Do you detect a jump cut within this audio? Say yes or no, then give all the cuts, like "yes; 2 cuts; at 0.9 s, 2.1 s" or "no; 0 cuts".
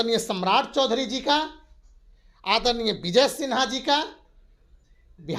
no; 0 cuts